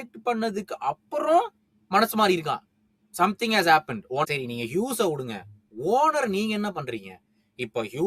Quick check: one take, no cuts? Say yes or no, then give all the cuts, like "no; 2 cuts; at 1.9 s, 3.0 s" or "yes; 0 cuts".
no; 1 cut; at 4.3 s